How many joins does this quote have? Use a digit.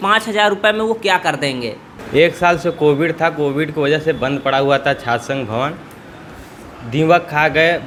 0